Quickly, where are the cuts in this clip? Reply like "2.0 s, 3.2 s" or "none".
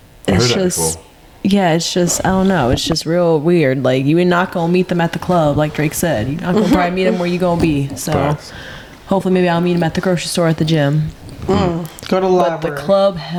none